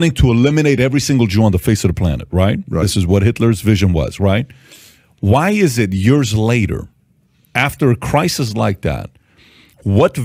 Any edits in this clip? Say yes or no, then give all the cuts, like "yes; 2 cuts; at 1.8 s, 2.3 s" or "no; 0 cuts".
yes; 1 cut; at 3.1 s